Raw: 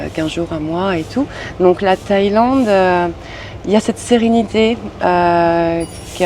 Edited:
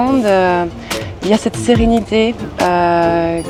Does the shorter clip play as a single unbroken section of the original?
yes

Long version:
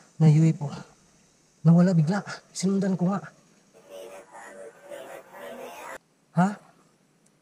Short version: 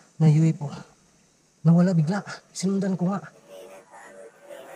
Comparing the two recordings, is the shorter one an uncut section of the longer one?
no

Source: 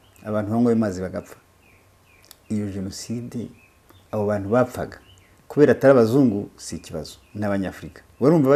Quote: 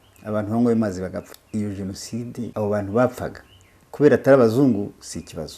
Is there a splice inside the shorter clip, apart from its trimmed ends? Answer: yes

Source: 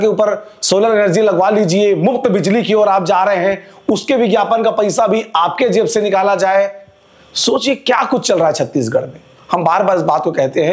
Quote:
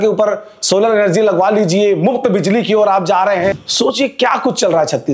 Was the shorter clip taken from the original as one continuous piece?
no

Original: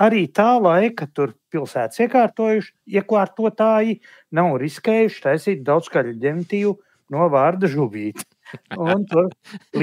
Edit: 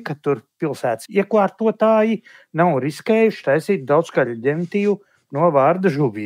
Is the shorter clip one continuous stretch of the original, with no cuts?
no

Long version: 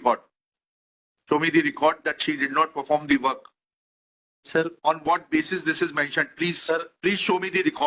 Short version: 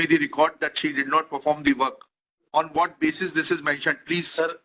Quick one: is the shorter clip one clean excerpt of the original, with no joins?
no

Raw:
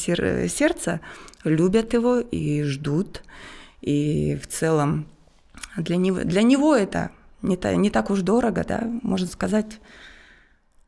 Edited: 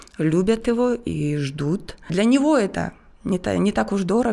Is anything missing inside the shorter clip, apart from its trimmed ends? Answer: yes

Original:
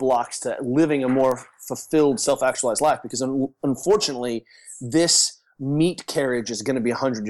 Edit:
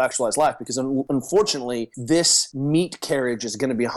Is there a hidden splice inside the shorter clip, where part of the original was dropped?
yes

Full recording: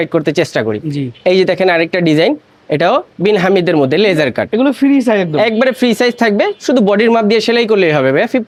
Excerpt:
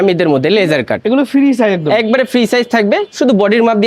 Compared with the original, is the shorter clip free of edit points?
yes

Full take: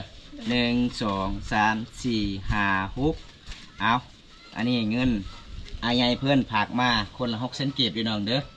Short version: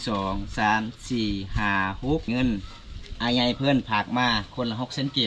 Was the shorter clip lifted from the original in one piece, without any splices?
no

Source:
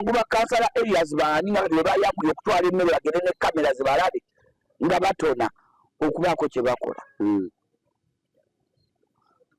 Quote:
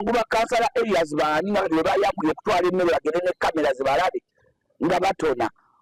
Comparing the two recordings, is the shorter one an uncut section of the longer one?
yes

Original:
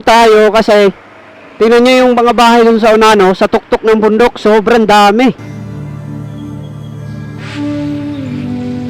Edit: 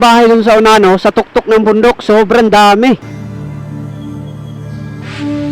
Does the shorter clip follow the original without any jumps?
yes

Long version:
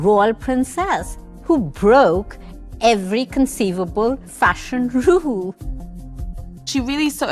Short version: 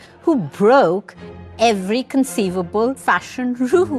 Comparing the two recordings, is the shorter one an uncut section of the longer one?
no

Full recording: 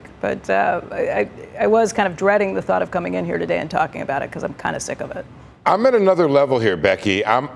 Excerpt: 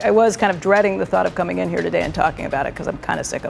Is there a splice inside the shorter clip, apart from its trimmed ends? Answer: no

